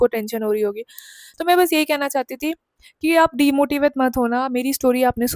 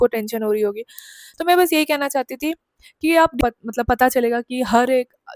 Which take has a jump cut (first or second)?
second